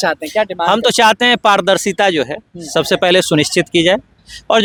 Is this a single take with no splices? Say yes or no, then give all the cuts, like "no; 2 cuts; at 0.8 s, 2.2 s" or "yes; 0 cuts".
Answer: yes; 0 cuts